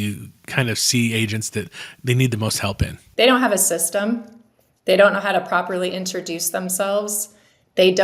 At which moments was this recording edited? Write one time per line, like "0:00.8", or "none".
0:03.0